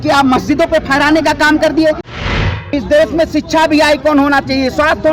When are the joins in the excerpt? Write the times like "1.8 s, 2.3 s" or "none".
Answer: 2.2 s

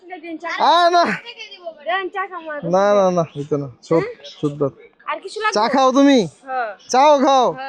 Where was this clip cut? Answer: none

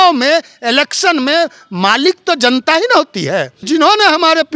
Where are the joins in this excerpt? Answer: 3.6 s

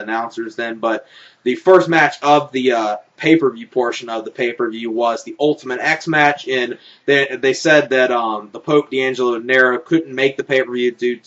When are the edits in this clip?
2.8 s

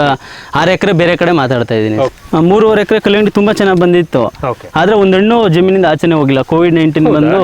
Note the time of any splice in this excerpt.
2.1 s

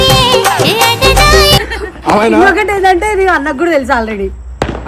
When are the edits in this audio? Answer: none

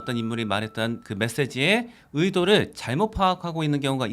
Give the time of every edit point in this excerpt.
1.1 s

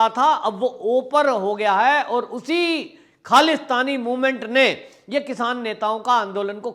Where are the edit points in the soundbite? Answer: none

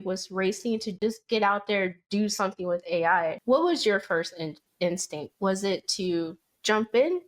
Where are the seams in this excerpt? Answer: 1.0 s, 3.4 s

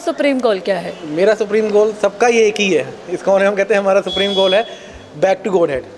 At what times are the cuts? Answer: none

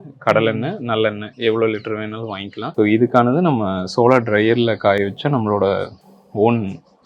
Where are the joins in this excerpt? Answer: 2.6 s

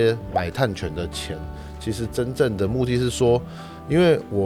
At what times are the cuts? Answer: none

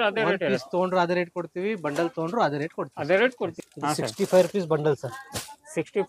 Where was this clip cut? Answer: 3.6 s

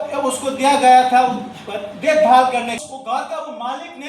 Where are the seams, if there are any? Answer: 2.8 s

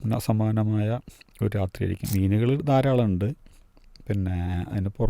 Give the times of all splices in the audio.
2.0 s

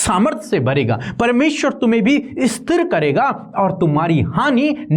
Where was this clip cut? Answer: none

